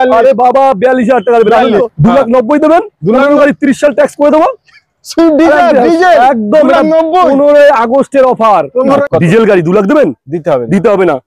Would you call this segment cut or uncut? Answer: cut